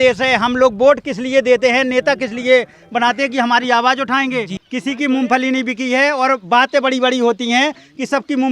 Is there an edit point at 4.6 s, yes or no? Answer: yes